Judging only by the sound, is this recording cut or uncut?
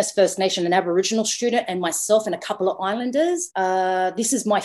cut